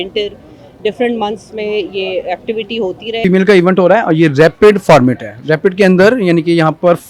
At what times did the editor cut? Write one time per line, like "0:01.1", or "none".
0:03.2